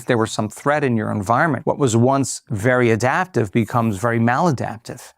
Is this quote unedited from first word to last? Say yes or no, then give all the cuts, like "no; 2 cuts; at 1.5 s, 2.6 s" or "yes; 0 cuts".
no; 1 cut; at 1.6 s